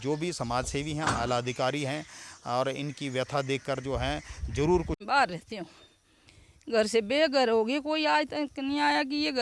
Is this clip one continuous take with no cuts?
no; 1 cut; at 5.0 s

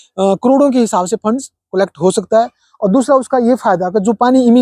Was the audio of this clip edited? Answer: no; 0 cuts

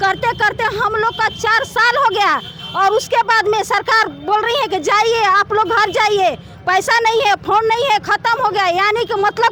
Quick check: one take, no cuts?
yes; 0 cuts

